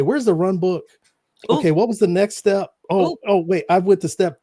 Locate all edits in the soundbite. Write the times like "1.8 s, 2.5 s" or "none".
none